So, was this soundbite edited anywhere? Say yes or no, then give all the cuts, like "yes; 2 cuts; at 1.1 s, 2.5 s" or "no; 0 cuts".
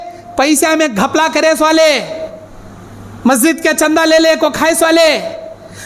no; 0 cuts